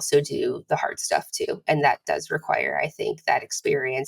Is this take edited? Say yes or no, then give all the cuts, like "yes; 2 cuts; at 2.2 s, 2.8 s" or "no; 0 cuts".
no; 0 cuts